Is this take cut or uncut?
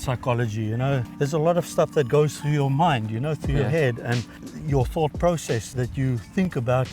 cut